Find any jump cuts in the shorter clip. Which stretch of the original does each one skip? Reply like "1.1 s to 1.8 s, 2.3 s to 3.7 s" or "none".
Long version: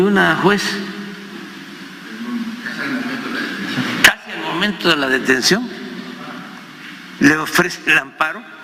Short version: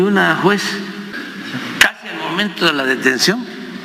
1.2 s to 3.4 s